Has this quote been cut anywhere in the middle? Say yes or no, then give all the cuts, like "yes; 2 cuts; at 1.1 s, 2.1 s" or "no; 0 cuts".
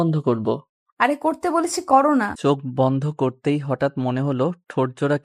yes; 1 cut; at 2.3 s